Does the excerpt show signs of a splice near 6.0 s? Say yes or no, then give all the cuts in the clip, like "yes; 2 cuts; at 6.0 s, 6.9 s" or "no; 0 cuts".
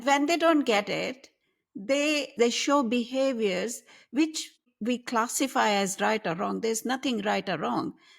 no; 2 cuts; at 2.3 s, 4.6 s